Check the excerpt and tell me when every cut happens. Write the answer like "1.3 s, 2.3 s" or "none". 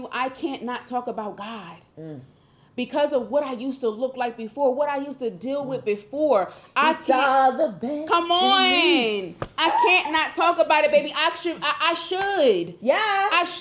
none